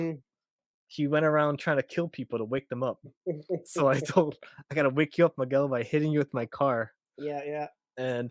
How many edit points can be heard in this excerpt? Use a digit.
0